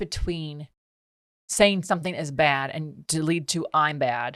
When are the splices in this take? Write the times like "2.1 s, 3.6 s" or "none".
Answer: none